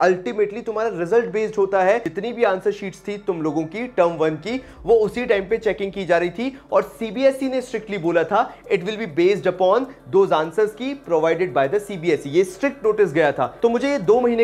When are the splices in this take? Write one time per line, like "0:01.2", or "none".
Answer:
0:02.1
0:13.5